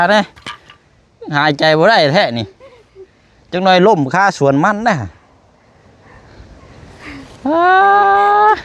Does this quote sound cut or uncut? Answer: uncut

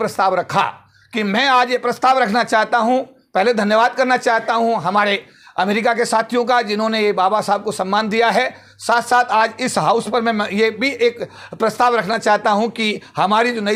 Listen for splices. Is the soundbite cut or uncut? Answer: uncut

